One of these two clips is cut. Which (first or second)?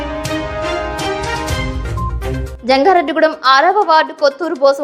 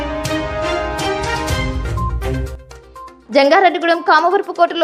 first